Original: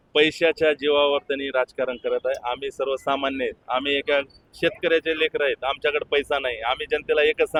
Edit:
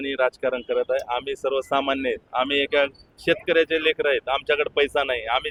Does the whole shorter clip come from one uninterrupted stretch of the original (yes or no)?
yes